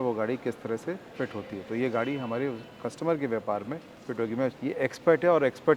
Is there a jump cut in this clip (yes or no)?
yes